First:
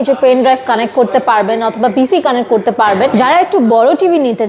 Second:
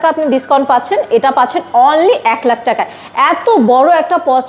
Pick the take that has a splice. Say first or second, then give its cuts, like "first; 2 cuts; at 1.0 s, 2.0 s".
first; 1 cut; at 3.1 s